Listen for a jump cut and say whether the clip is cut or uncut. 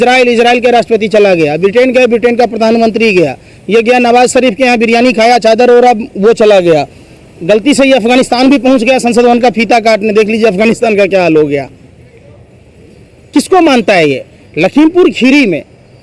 uncut